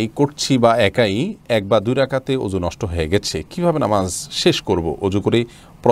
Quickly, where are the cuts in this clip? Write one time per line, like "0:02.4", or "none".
none